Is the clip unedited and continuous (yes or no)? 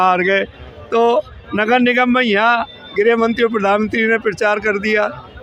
yes